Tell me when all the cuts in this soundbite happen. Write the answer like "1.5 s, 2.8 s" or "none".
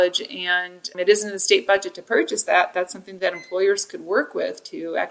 none